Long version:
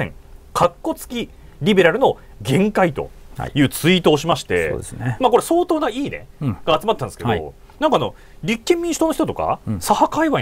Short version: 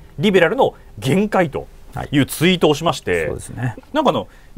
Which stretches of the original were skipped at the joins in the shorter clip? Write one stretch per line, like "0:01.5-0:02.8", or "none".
0:05.1-0:07.5